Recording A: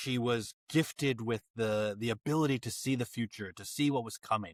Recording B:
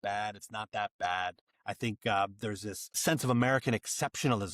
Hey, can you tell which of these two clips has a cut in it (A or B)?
B